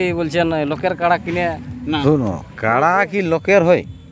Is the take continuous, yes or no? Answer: no